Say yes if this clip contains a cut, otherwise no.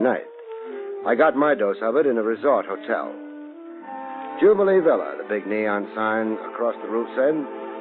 yes